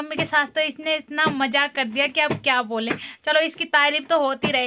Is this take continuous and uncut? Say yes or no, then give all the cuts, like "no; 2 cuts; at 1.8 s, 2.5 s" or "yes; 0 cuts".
yes; 0 cuts